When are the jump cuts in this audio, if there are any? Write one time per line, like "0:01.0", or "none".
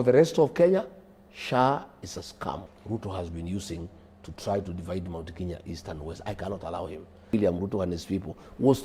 0:02.7
0:07.3